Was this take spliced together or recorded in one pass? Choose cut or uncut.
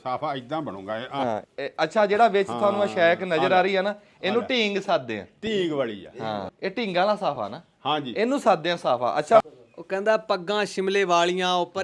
cut